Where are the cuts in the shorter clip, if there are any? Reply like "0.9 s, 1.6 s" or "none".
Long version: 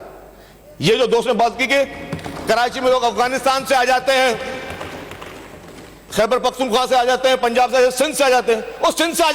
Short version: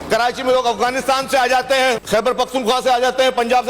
2.0 s